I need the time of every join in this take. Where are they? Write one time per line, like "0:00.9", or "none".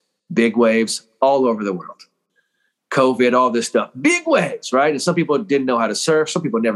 none